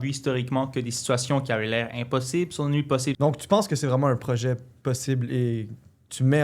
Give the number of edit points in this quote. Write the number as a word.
one